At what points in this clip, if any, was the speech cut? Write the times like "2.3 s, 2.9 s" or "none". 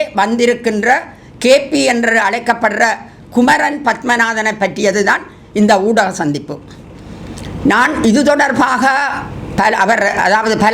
none